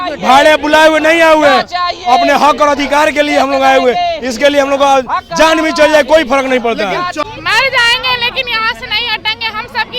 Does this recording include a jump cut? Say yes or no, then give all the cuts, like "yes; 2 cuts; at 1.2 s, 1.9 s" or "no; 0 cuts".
yes; 1 cut; at 7.2 s